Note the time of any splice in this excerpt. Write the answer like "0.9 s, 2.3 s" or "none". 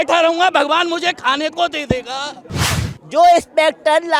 2.6 s